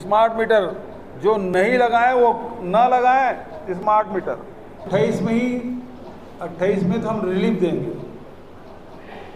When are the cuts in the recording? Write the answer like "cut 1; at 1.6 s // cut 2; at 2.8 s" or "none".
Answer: cut 1; at 4.8 s